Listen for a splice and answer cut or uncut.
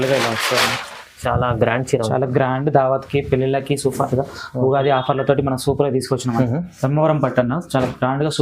cut